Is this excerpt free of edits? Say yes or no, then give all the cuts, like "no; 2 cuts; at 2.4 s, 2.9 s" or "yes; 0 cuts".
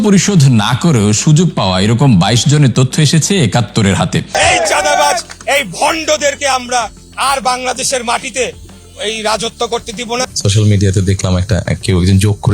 no; 2 cuts; at 4.3 s, 10.2 s